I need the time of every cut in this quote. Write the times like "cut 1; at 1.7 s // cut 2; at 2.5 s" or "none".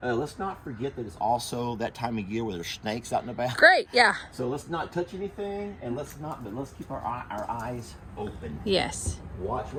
none